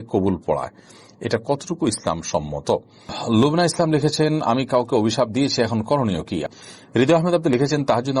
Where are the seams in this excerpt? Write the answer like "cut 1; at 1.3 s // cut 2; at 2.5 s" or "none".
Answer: cut 1; at 3.2 s // cut 2; at 6.4 s